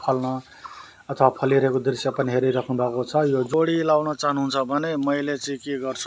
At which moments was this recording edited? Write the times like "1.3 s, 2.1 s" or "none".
3.5 s